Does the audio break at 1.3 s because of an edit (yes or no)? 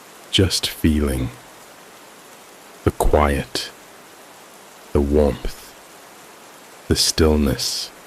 yes